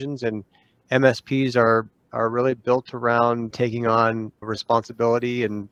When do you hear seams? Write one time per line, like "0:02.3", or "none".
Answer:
none